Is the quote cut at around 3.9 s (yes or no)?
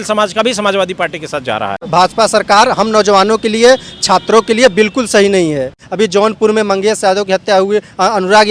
no